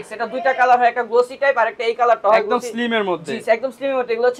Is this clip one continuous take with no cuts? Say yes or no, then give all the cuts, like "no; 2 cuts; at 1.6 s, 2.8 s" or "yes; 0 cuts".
yes; 0 cuts